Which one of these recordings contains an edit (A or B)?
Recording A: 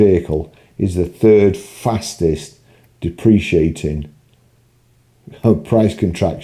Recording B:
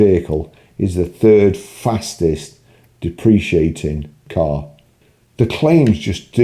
B